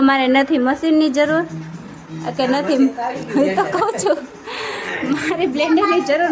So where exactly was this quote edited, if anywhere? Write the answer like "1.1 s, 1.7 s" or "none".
none